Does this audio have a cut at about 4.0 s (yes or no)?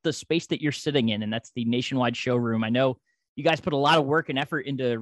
no